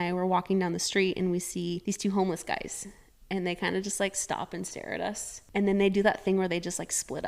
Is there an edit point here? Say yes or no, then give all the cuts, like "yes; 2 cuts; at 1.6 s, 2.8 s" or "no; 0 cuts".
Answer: yes; 2 cuts; at 1.8 s, 5.3 s